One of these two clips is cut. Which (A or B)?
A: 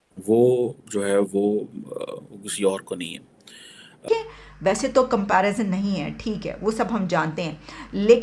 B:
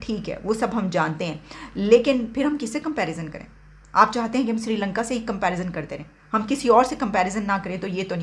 A